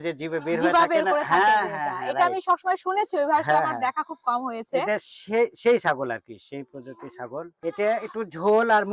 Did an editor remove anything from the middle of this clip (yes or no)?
yes